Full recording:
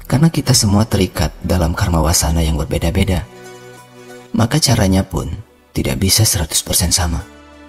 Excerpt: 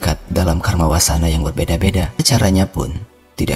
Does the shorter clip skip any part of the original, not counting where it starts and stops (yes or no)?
yes